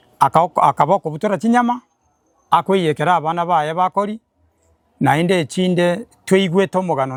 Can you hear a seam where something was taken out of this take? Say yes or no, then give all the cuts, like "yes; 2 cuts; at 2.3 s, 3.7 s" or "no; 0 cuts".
no; 0 cuts